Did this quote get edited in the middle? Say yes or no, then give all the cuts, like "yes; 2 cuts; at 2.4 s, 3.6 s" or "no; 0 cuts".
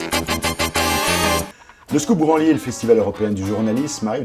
yes; 1 cut; at 1.6 s